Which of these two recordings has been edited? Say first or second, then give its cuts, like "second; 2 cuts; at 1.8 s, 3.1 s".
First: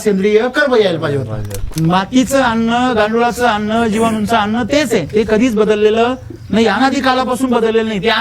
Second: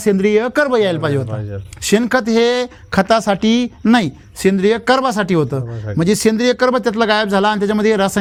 first; 1 cut; at 1.6 s